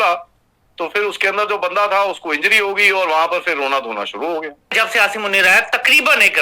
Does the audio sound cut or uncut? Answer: cut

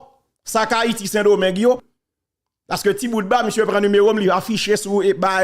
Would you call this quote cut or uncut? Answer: cut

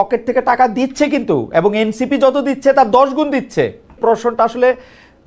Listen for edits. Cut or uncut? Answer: cut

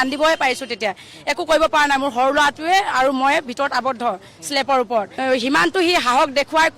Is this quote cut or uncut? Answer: cut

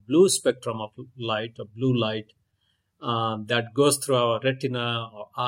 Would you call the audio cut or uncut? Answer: uncut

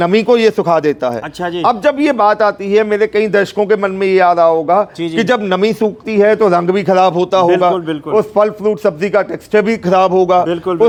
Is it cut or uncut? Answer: uncut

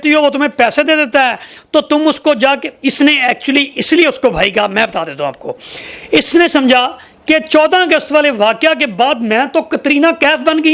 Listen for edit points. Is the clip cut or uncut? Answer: uncut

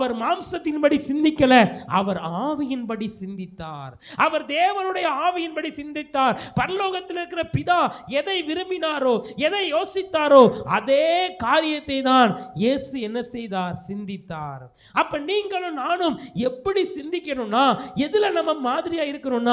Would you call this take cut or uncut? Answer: uncut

